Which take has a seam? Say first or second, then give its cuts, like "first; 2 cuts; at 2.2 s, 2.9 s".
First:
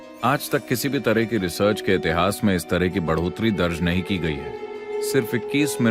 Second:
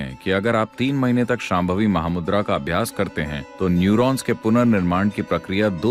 first; 1 cut; at 4.5 s